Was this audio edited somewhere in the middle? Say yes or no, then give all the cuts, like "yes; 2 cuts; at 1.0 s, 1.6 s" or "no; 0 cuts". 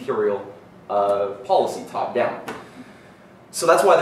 no; 0 cuts